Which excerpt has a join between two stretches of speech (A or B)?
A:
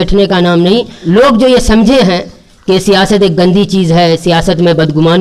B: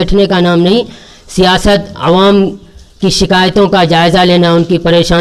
A